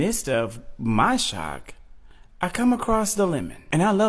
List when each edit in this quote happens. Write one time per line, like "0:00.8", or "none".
none